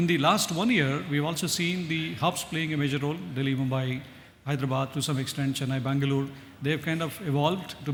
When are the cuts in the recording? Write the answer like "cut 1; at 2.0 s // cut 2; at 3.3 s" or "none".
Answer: none